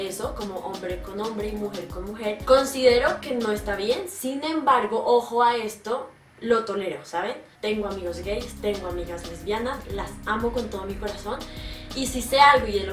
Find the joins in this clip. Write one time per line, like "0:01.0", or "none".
0:05.4
0:07.4